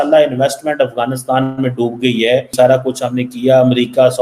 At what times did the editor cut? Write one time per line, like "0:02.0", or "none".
0:02.5